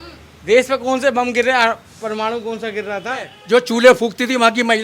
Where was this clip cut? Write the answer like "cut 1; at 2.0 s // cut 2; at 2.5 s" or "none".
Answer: cut 1; at 3.4 s